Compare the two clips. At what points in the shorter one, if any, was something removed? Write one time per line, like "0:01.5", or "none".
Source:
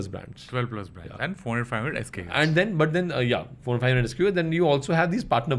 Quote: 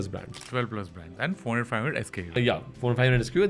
0:02.3